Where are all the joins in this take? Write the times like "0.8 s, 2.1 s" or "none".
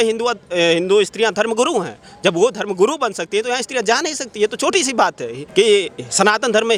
none

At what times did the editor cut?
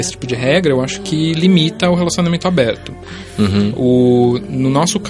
none

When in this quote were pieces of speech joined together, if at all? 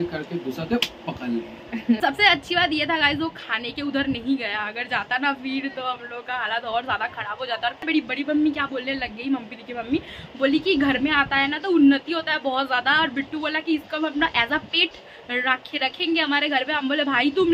2.0 s, 7.9 s

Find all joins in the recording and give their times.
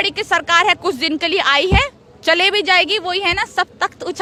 none

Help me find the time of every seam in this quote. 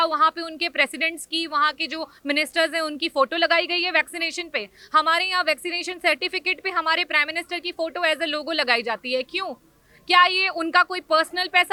none

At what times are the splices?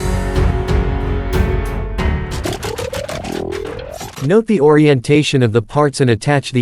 0.8 s, 2.4 s, 4.1 s

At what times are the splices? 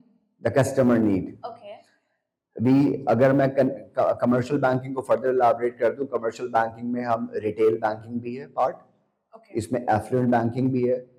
none

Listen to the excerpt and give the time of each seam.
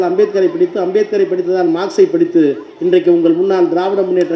none

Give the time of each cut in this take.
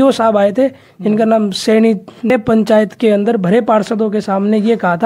2.3 s

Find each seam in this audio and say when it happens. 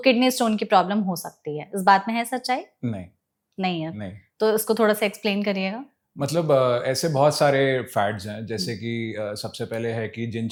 none

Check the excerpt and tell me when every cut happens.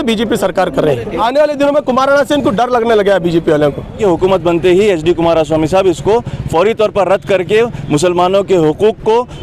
1.2 s, 4.0 s

